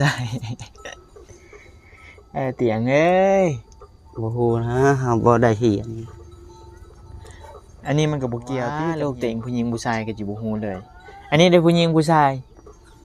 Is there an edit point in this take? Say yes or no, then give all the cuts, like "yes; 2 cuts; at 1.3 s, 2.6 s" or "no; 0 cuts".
yes; 1 cut; at 8.7 s